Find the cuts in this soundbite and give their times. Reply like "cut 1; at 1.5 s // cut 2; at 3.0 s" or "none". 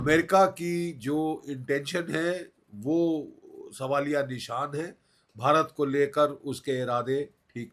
none